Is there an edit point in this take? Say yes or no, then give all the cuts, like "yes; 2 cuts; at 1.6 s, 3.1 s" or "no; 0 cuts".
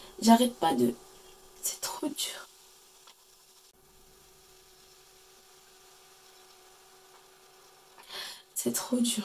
no; 0 cuts